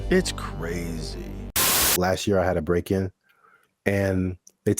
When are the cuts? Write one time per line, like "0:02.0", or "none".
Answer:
0:01.9